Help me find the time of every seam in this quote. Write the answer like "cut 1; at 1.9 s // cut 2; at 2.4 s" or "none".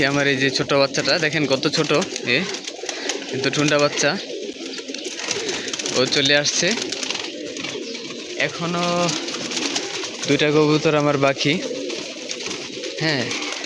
none